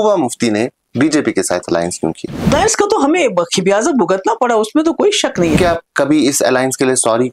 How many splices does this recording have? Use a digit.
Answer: 2